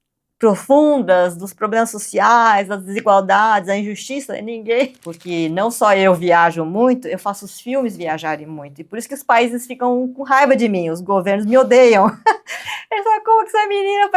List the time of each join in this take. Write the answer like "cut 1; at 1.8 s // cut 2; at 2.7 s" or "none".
cut 1; at 4.9 s